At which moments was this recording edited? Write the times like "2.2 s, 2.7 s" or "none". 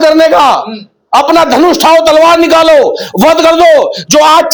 none